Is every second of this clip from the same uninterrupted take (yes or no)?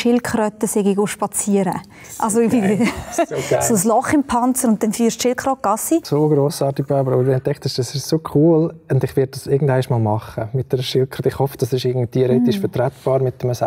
no